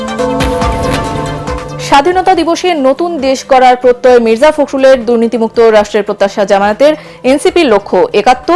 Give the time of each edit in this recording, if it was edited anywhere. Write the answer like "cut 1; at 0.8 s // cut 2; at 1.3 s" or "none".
cut 1; at 1.4 s